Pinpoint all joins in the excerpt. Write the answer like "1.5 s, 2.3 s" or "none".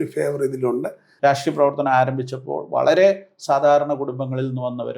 1.4 s